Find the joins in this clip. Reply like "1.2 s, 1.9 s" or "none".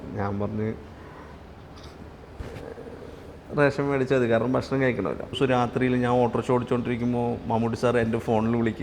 5.3 s